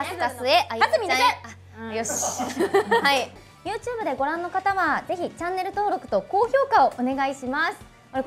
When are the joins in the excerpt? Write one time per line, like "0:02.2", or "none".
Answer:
0:03.4